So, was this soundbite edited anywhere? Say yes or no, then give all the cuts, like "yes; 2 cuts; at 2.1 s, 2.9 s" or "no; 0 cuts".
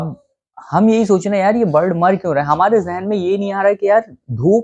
no; 0 cuts